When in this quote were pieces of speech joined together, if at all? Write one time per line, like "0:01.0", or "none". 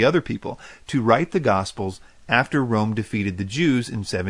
0:03.3